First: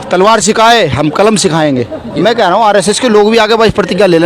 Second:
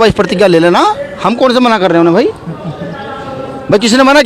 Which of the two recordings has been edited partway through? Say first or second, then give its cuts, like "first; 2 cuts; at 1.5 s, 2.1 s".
first; 1 cut; at 2.1 s